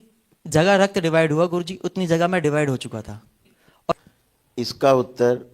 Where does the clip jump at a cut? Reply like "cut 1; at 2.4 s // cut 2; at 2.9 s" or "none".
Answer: cut 1; at 3.9 s

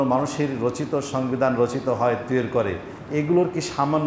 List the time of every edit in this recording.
none

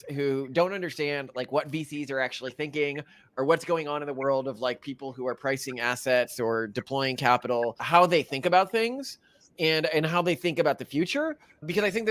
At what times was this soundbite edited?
cut 1; at 7.8 s

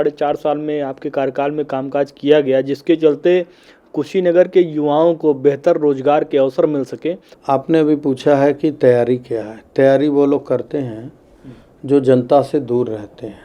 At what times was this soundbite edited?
cut 1; at 7.3 s

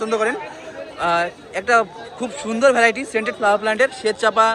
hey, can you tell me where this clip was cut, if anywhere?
none

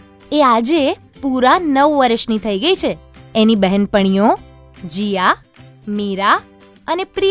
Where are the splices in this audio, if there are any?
none

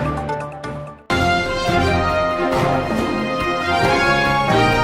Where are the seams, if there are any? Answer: cut 1; at 0.9 s

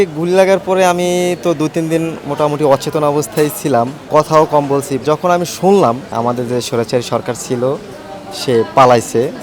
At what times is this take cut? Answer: cut 1; at 4.0 s // cut 2; at 6.1 s

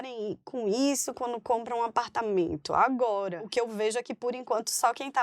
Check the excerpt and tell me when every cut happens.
cut 1; at 3.5 s

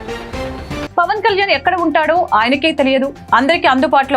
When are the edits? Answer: cut 1; at 0.9 s

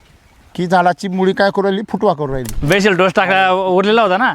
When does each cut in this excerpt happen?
cut 1; at 2.5 s

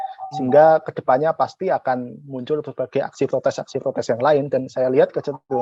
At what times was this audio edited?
none

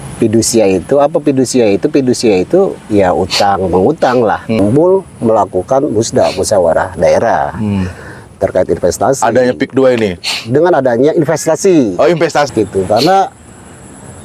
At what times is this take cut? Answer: cut 1; at 4.6 s // cut 2; at 12.5 s

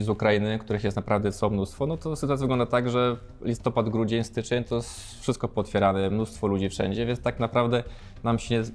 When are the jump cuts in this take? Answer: none

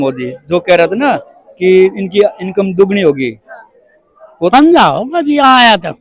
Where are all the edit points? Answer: cut 1; at 4.5 s

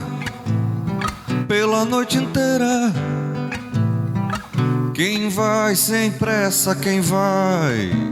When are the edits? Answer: none

